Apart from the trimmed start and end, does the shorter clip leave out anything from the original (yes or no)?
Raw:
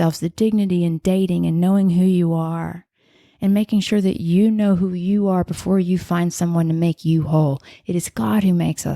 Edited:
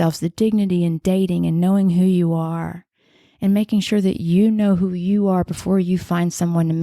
no